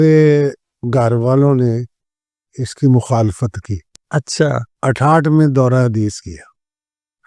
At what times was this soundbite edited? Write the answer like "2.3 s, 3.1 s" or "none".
4.7 s